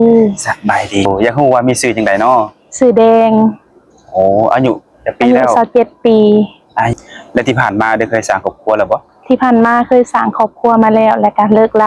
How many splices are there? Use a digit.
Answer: 2